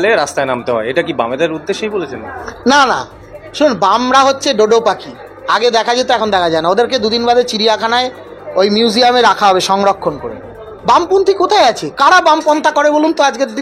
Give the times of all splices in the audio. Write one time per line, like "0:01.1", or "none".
none